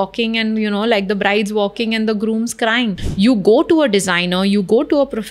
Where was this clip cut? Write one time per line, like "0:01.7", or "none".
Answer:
0:03.0